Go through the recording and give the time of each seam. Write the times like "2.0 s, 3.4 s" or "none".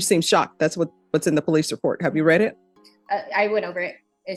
none

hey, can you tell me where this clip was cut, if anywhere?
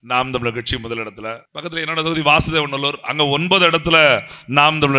1.5 s

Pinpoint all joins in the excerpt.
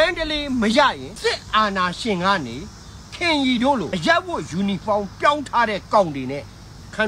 1.1 s, 3.9 s

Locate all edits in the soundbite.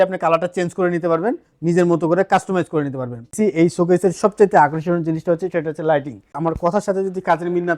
3.4 s, 6.4 s

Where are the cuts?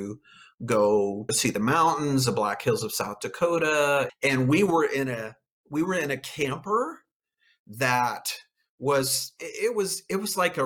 4.1 s

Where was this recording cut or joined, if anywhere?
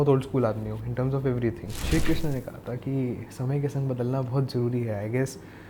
1.8 s

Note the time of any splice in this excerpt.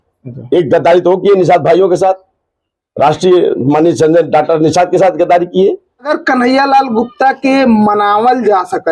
6.1 s

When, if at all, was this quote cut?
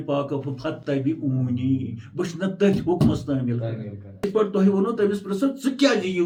none

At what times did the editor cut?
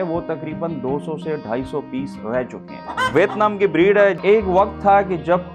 2.8 s, 4.2 s

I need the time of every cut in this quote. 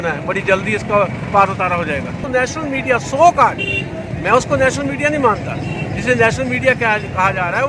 2.2 s

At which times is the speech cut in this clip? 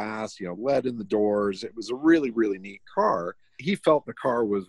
3.6 s

